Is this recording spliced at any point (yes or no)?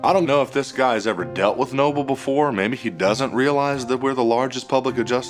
no